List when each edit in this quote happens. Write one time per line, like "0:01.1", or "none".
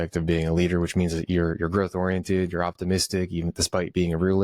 none